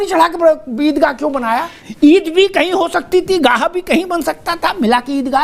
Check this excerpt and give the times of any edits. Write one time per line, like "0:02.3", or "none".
0:01.8